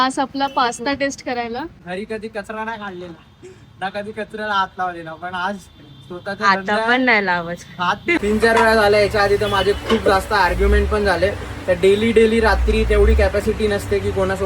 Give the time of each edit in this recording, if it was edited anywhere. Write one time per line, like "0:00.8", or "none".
0:01.8
0:08.2